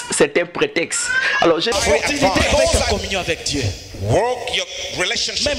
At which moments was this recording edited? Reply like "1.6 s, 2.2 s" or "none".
1.7 s